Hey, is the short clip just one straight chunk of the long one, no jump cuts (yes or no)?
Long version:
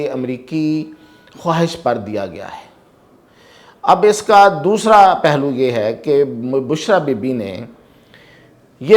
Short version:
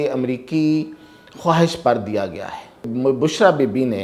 no